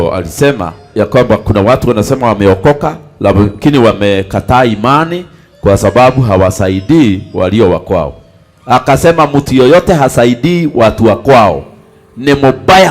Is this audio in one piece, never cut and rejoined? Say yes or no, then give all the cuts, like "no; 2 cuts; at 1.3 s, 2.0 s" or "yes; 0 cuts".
no; 1 cut; at 0.9 s